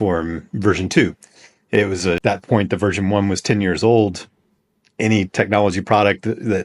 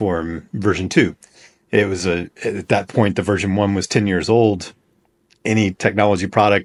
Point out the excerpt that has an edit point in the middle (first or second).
first